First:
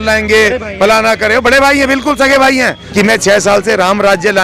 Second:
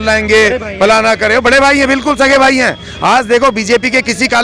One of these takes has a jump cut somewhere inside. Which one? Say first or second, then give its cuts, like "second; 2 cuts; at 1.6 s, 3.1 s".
first; 1 cut; at 2.8 s